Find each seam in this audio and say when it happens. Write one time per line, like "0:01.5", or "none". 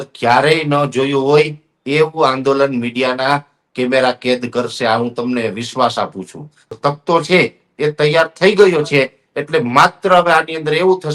0:06.6